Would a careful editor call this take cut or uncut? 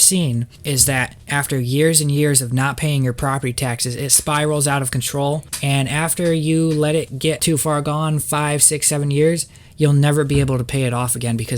cut